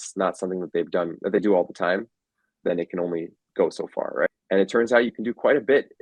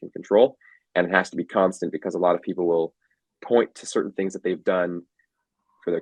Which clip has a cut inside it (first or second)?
first